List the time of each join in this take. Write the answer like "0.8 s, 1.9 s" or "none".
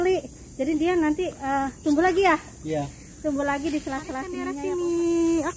4.6 s